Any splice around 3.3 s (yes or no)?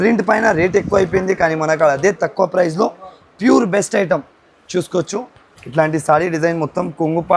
no